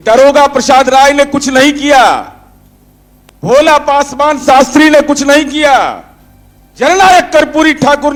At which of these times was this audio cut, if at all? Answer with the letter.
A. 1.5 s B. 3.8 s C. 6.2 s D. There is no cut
D